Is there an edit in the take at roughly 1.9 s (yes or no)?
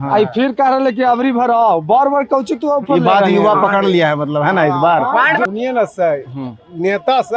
no